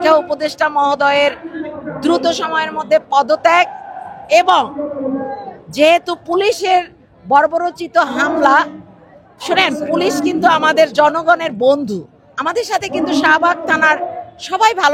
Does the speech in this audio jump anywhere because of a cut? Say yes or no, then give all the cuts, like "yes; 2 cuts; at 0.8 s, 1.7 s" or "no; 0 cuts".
no; 0 cuts